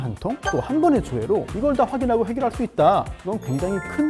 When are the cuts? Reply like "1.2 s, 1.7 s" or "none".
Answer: none